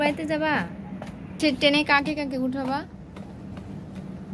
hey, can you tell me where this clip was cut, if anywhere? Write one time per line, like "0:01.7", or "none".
0:01.4